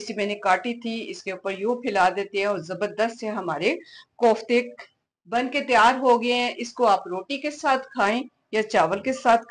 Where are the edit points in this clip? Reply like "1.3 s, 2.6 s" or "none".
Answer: none